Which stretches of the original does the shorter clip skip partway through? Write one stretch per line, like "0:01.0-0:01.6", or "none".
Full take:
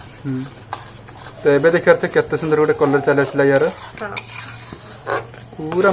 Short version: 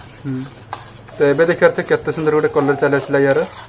0:01.0-0:01.2